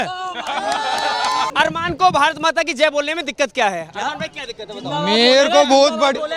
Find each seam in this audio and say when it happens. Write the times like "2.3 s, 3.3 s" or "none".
1.5 s